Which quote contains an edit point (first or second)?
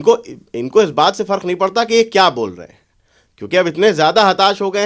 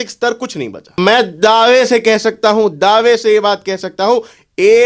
second